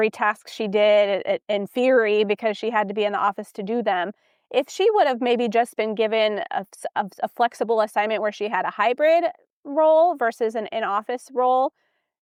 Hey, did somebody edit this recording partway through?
no; 0 cuts

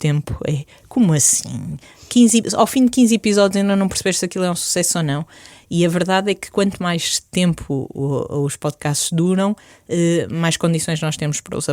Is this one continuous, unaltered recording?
yes; 0 cuts

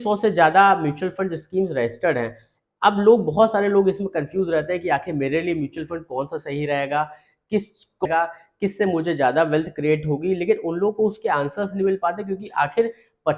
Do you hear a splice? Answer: yes; 1 cut; at 8.1 s

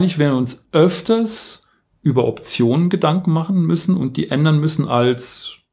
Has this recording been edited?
no; 0 cuts

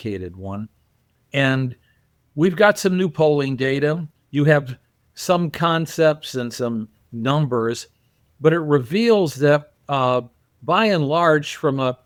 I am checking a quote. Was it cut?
no; 0 cuts

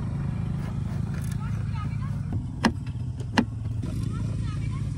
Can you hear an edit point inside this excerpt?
no; 0 cuts

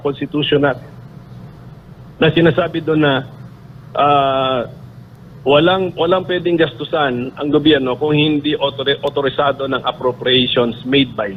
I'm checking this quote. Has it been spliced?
no; 0 cuts

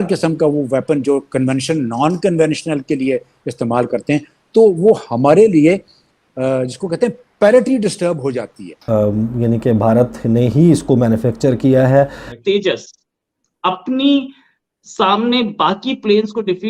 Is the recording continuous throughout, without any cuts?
no; 2 cuts; at 8.8 s, 12.3 s

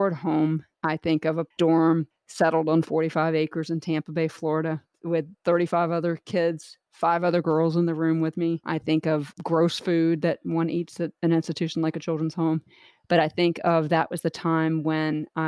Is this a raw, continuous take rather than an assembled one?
no; 1 cut; at 6.2 s

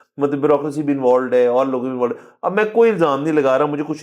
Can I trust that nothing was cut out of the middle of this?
yes; 0 cuts

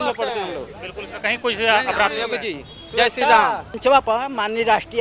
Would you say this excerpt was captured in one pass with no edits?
no; 1 cut; at 3.7 s

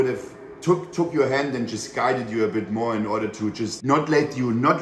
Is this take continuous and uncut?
yes; 0 cuts

